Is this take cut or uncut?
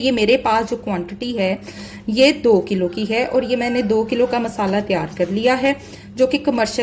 uncut